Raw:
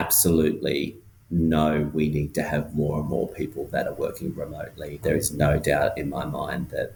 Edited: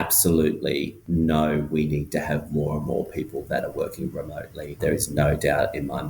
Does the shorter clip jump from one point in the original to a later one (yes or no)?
yes